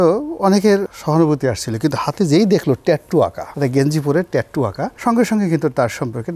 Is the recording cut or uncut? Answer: cut